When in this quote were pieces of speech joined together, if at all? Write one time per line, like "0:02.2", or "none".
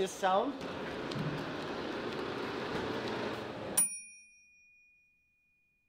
none